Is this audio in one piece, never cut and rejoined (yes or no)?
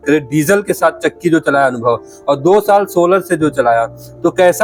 yes